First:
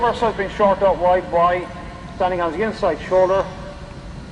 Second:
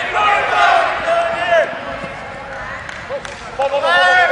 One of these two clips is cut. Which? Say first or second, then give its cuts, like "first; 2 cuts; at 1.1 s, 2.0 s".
second; 1 cut; at 3.4 s